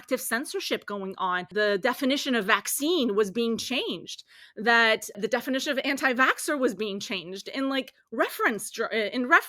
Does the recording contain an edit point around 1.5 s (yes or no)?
yes